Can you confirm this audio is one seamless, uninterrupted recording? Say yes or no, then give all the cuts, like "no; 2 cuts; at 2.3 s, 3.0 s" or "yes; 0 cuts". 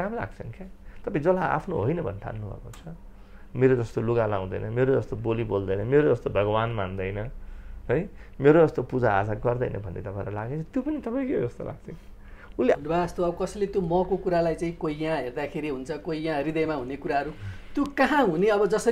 no; 1 cut; at 12.8 s